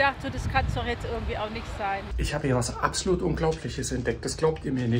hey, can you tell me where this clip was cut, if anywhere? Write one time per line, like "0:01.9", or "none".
0:02.1